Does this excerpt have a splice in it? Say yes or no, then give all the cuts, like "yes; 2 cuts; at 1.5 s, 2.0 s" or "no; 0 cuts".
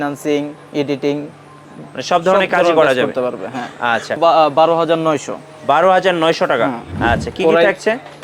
yes; 2 cuts; at 4.2 s, 6.9 s